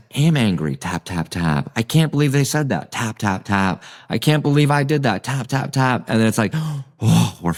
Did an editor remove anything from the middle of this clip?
no; 0 cuts

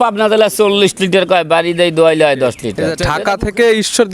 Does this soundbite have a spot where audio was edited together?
yes; 1 cut; at 2.9 s

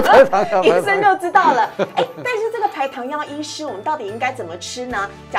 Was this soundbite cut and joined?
no; 0 cuts

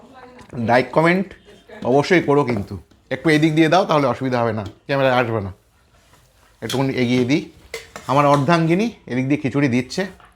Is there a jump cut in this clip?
no; 0 cuts

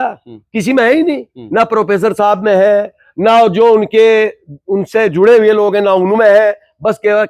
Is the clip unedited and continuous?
yes; 0 cuts

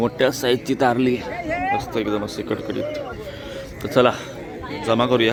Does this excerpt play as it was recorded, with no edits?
yes; 0 cuts

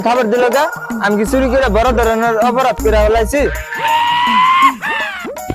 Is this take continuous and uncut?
no; 1 cut; at 3.7 s

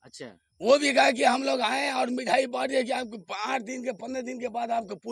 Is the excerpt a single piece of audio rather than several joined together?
yes; 0 cuts

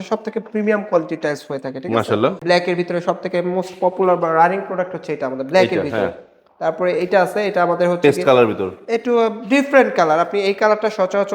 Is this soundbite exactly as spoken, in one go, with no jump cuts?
no; 1 cut; at 2.4 s

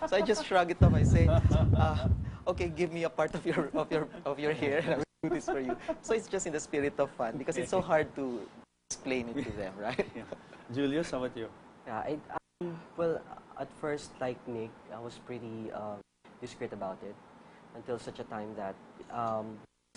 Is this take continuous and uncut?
yes; 0 cuts

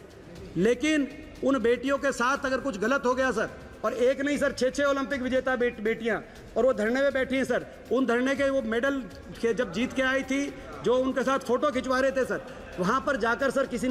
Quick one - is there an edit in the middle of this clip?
no; 0 cuts

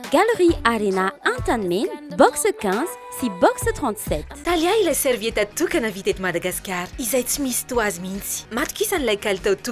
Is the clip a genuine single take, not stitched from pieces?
no; 1 cut; at 4.3 s

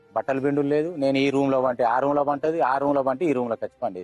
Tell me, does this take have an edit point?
no; 0 cuts

